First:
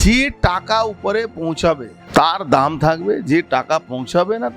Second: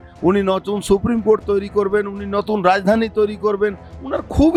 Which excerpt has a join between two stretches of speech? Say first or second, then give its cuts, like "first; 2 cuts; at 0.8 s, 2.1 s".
first; 1 cut; at 1.9 s